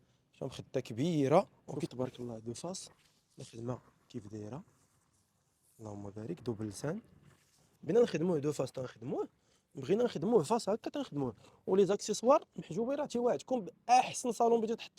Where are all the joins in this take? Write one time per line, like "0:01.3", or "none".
0:01.8
0:07.7